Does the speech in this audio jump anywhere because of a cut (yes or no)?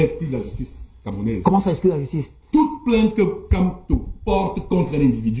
no